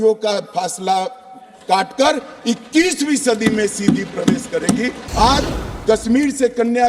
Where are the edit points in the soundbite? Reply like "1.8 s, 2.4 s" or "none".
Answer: 5.0 s